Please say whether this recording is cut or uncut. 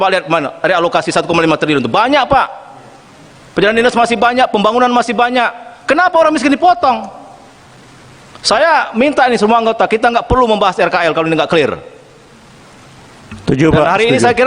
uncut